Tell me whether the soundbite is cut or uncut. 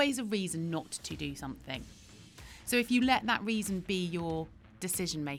uncut